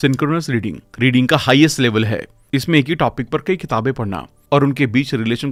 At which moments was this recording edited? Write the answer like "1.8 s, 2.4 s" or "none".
none